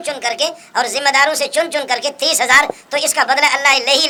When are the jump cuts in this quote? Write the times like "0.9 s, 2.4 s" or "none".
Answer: none